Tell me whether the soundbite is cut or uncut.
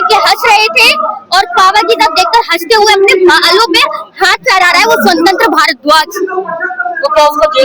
uncut